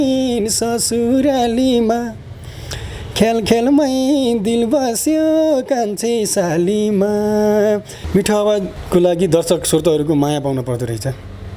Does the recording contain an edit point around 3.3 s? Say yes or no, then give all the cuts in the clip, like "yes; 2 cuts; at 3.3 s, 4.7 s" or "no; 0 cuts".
no; 2 cuts; at 7.9 s, 8.8 s